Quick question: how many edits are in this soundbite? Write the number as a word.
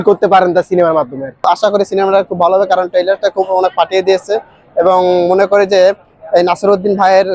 one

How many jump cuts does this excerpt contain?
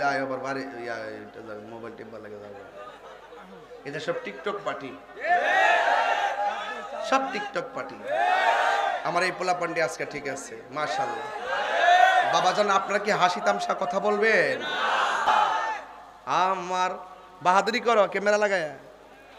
one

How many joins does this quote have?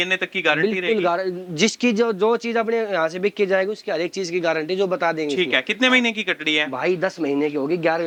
zero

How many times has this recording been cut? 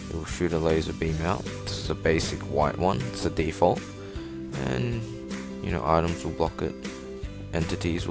zero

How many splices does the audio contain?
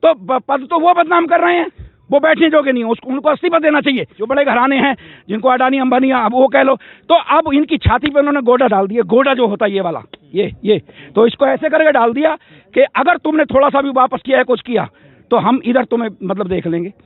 one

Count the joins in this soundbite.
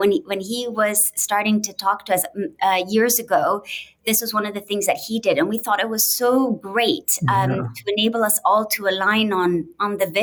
zero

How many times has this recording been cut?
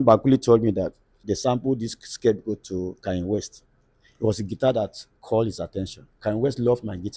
two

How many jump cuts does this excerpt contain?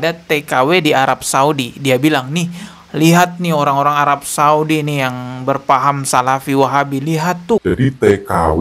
one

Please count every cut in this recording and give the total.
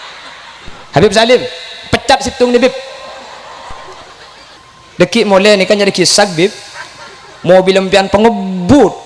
one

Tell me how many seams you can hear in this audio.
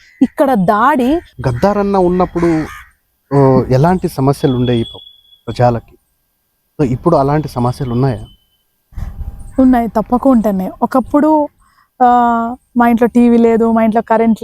one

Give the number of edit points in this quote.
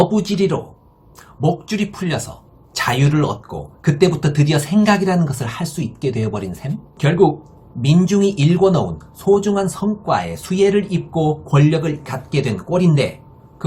one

